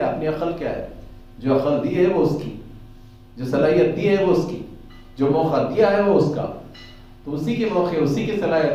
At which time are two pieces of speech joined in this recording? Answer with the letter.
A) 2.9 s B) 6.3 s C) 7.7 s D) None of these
D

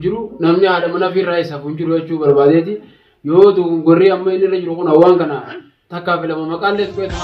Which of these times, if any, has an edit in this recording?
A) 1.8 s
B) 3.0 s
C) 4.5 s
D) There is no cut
D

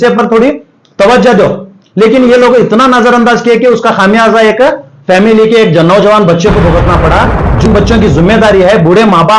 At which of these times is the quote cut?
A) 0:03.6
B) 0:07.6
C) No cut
B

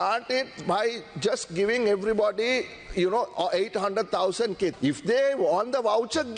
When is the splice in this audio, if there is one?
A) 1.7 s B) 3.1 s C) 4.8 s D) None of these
C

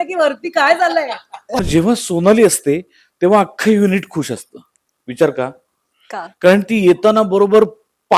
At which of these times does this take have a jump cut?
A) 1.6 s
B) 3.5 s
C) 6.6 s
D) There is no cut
A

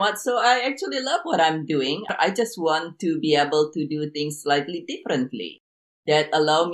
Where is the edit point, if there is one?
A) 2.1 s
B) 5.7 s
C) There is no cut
A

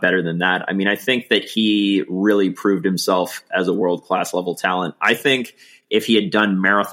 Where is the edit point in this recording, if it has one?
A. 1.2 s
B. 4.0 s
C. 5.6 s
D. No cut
D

